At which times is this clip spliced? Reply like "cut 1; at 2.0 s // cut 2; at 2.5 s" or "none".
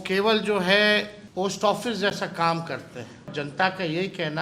cut 1; at 1.2 s // cut 2; at 3.3 s